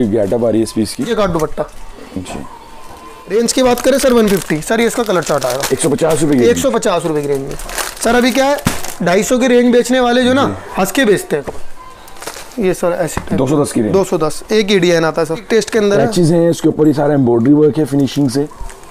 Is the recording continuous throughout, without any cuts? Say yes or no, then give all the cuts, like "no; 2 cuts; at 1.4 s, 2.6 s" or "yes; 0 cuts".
no; 4 cuts; at 1.1 s, 3.3 s, 11.5 s, 15.4 s